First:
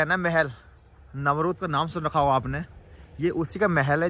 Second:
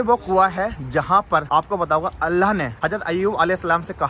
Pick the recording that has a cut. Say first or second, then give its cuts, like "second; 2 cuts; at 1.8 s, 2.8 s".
second; 2 cuts; at 1.4 s, 2.7 s